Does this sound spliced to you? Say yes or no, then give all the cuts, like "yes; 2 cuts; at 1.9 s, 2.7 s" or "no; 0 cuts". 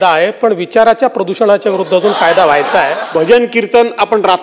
yes; 1 cut; at 3.0 s